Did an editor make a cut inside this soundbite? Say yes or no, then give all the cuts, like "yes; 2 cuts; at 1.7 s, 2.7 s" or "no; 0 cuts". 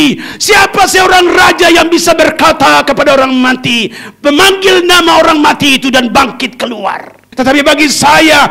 yes; 1 cut; at 7.2 s